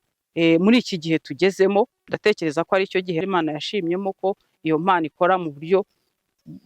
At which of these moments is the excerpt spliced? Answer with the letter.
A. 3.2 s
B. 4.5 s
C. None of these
A